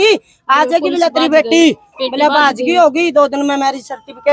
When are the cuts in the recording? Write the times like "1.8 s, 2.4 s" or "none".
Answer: none